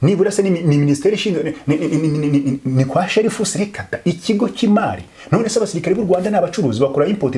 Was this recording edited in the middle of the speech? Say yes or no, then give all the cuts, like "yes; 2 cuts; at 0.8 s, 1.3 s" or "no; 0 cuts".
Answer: no; 0 cuts